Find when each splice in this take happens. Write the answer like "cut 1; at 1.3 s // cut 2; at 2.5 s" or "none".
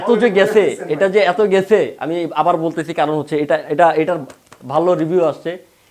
none

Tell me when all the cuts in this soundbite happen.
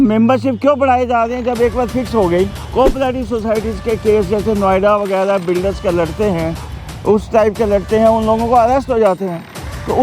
cut 1; at 2.6 s

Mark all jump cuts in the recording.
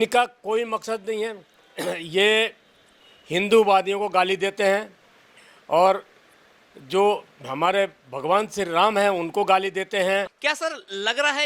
cut 1; at 10.3 s

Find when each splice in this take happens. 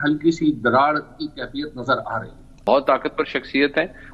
cut 1; at 2.7 s

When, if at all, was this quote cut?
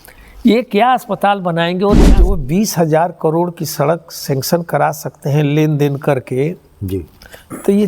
cut 1; at 2.0 s

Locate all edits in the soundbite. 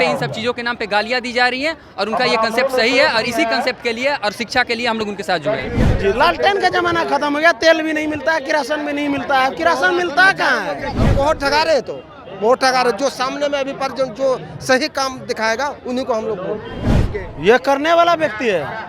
cut 1; at 5.8 s // cut 2; at 11.0 s // cut 3; at 16.9 s

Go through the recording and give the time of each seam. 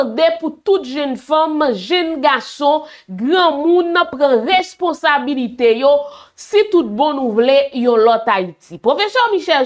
none

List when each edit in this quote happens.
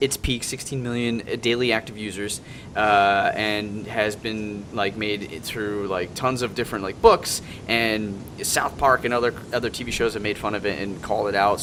none

